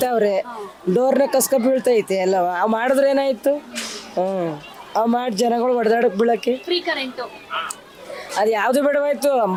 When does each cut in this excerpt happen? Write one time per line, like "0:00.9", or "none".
none